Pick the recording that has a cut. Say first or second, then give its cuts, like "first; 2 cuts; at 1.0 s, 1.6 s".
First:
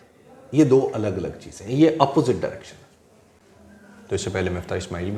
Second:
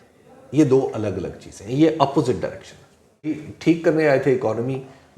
second; 1 cut; at 3.5 s